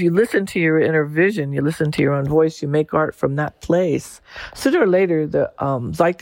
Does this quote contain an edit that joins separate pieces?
no; 0 cuts

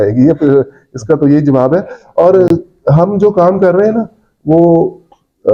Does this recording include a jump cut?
no; 0 cuts

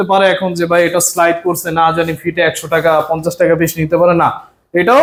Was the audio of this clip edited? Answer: no; 0 cuts

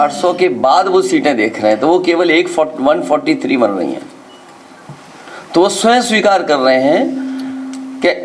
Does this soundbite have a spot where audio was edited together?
no; 0 cuts

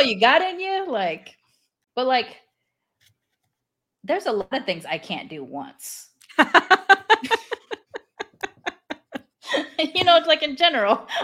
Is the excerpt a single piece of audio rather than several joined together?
no; 1 cut; at 1.8 s

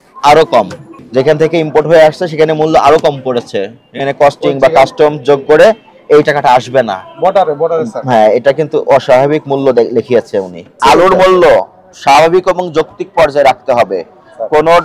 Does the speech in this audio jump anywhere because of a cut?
yes; 1 cut; at 10.7 s

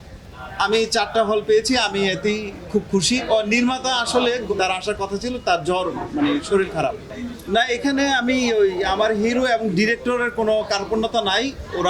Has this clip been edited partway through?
yes; 3 cuts; at 3.2 s, 4.5 s, 7.1 s

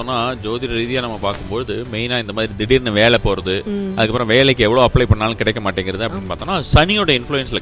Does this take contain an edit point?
no; 0 cuts

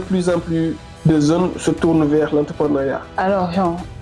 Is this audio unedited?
no; 2 cuts; at 0.9 s, 3.1 s

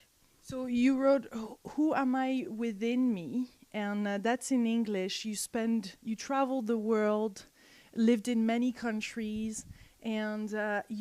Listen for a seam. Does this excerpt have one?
yes; 1 cut; at 5.9 s

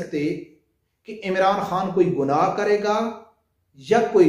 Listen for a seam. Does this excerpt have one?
no; 0 cuts

